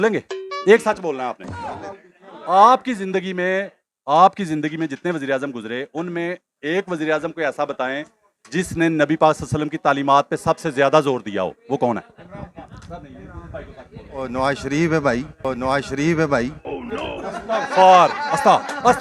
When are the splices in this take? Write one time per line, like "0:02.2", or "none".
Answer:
none